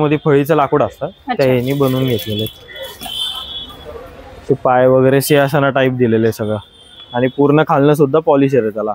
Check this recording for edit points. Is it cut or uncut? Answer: uncut